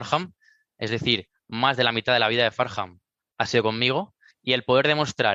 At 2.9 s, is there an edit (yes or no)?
no